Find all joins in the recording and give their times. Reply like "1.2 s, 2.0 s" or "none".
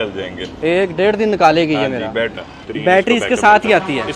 2.6 s